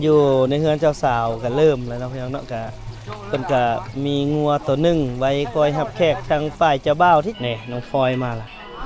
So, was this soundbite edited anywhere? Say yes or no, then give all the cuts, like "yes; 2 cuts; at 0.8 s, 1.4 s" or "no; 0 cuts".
yes; 1 cut; at 7.3 s